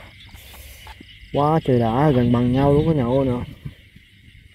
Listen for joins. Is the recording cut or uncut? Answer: uncut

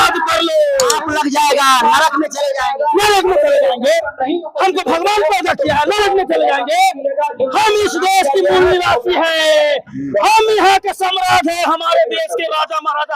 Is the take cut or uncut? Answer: cut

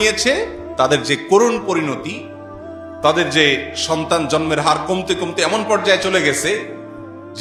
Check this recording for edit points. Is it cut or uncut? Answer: uncut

